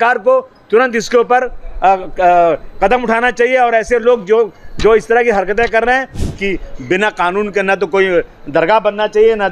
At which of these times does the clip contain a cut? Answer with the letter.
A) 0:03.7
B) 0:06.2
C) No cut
B